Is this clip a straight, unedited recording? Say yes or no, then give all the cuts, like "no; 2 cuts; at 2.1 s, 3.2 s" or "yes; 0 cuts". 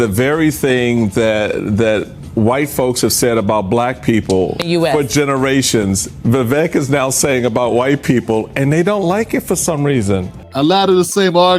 no; 1 cut; at 4.6 s